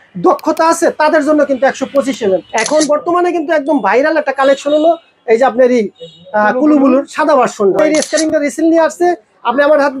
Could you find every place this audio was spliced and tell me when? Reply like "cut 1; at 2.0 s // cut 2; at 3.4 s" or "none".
cut 1; at 2.5 s // cut 2; at 7.8 s